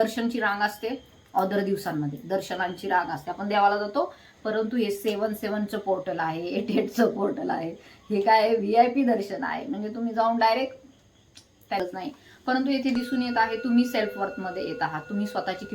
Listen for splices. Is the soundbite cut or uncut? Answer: cut